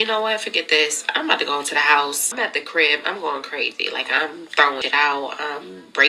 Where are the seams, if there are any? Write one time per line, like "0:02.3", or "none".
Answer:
0:02.3
0:04.8